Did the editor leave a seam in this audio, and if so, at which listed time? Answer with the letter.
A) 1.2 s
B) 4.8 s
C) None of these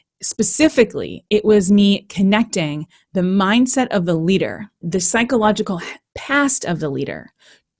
B